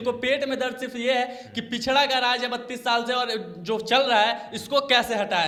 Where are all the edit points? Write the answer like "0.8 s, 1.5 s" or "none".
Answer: none